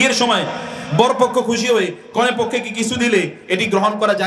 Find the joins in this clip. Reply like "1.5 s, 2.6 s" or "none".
none